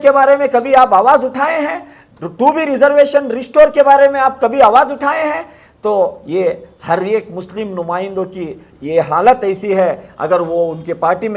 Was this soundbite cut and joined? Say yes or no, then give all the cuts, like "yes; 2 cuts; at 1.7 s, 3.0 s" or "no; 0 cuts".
no; 0 cuts